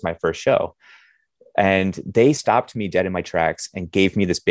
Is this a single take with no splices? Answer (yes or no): yes